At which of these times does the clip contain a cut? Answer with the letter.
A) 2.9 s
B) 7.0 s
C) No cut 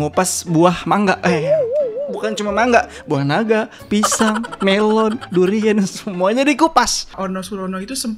B